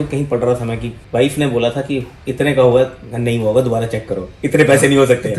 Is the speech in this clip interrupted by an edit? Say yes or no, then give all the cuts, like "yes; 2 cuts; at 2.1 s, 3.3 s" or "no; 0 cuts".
yes; 1 cut; at 0.9 s